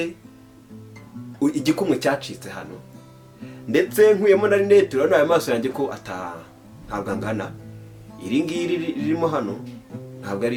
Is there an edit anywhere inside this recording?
no; 0 cuts

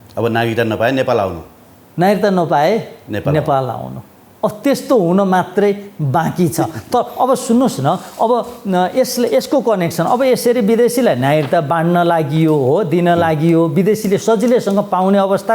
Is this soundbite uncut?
yes; 0 cuts

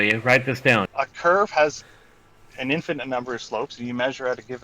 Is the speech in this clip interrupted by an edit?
yes; 1 cut; at 0.9 s

